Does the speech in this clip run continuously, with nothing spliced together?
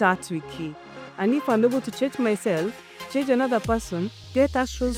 yes; 0 cuts

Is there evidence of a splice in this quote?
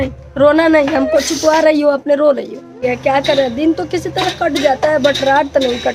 yes; 1 cut; at 2.8 s

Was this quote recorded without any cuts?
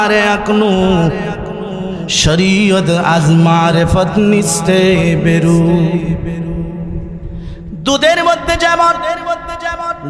yes; 0 cuts

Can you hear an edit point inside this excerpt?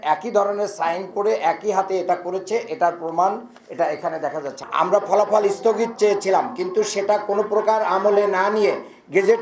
yes; 1 cut; at 4.5 s

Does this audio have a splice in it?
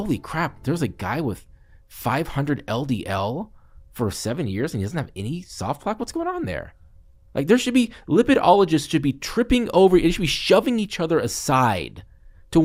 no; 0 cuts

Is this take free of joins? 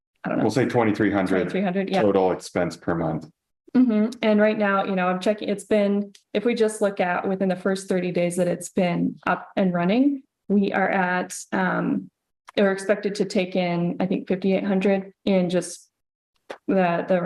yes; 0 cuts

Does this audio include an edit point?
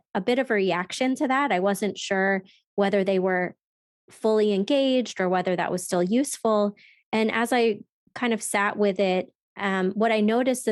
no; 0 cuts

